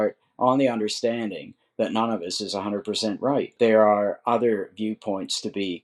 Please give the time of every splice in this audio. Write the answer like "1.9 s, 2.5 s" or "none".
3.5 s